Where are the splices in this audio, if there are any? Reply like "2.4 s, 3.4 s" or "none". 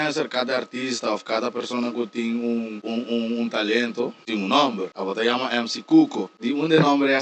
2.8 s, 4.2 s, 4.9 s, 6.3 s